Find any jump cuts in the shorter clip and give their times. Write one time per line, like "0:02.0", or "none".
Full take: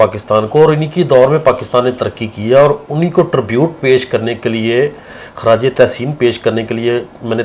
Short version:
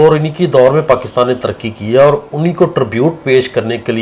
none